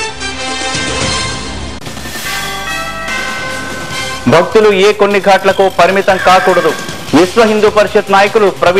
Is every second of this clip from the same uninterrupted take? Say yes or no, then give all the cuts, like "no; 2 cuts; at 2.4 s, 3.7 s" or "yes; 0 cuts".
yes; 0 cuts